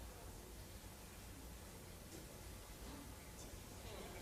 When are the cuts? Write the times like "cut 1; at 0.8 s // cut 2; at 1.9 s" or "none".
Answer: none